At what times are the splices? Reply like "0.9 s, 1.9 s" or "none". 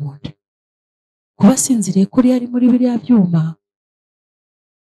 none